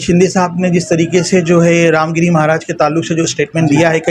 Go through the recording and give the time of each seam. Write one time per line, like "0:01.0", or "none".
none